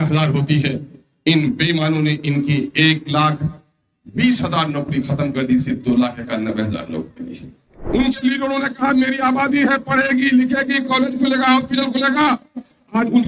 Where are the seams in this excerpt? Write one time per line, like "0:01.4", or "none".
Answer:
0:07.7

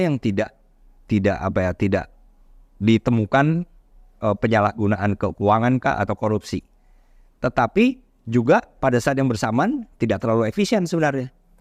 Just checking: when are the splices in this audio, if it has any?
none

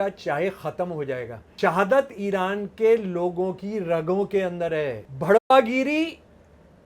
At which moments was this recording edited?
0:01.4
0:05.1

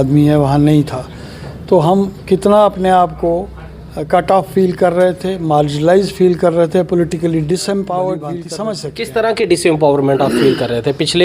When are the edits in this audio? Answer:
0:08.5

